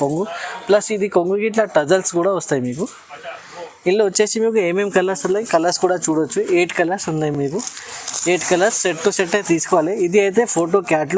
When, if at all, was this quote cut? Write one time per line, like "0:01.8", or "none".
none